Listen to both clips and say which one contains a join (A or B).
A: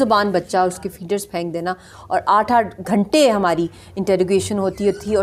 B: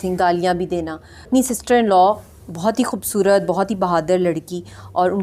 B